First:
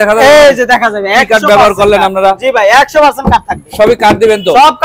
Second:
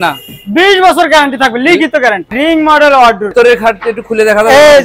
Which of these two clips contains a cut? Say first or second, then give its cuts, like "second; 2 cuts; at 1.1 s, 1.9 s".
second; 2 cuts; at 2.3 s, 3.3 s